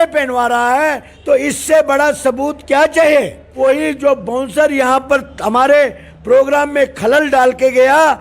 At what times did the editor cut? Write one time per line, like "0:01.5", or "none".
0:03.4